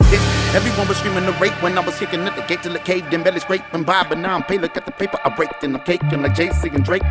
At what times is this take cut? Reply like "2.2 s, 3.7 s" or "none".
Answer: none

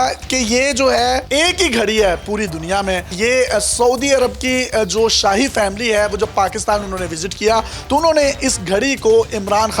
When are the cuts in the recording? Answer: 1.2 s

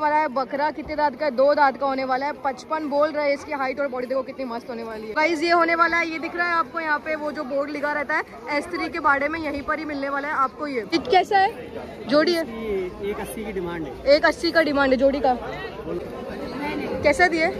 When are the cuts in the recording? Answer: 5.1 s, 10.9 s, 16.0 s

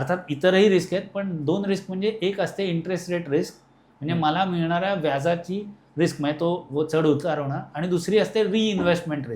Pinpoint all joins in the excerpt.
none

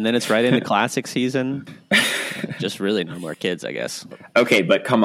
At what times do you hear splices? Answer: 2.0 s, 4.1 s

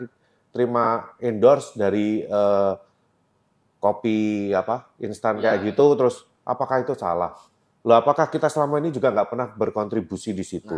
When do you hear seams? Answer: none

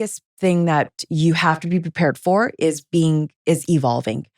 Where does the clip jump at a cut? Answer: 1.0 s

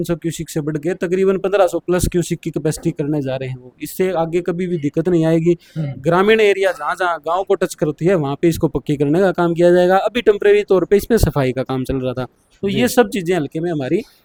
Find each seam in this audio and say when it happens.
none

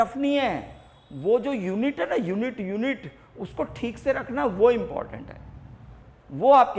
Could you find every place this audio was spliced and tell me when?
none

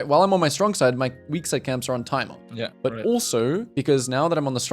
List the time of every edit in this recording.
2.4 s, 3.7 s

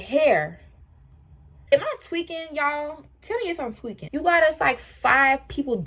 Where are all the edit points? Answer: 1.7 s, 4.1 s

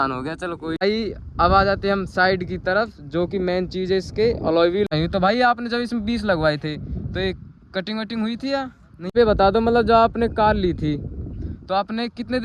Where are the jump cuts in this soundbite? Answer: 0.8 s, 4.9 s, 9.1 s

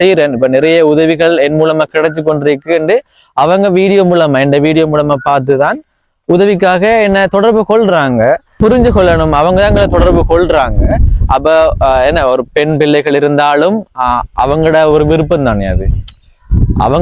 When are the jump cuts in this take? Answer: 8.6 s

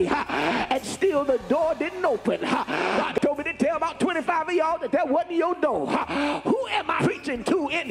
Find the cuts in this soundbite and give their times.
3.1 s, 6.9 s

